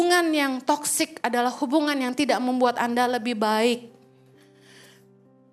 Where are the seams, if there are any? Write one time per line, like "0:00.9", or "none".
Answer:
none